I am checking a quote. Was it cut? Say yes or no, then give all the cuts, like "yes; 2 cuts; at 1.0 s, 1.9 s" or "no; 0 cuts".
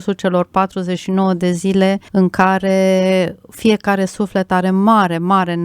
yes; 1 cut; at 2.0 s